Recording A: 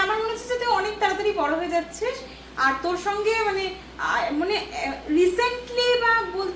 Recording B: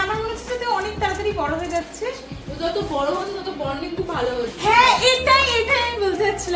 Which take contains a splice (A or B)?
B